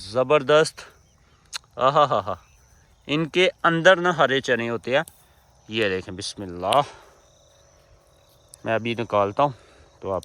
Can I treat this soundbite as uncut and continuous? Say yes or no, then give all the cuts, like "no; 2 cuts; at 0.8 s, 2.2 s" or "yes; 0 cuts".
yes; 0 cuts